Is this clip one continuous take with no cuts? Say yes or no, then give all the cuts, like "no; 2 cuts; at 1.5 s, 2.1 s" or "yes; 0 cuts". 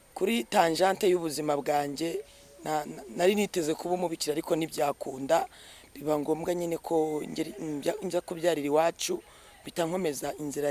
yes; 0 cuts